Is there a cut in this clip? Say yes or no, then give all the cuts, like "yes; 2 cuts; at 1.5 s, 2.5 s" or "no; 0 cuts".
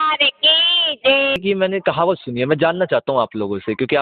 yes; 1 cut; at 1.4 s